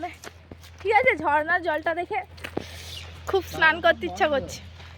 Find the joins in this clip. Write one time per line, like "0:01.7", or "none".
none